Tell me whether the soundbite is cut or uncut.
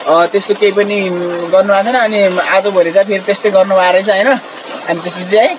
uncut